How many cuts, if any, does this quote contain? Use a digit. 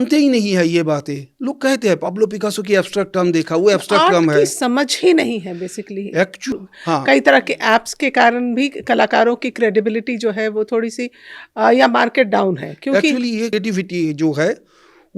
2